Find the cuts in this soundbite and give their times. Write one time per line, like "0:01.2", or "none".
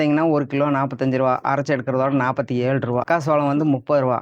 0:03.0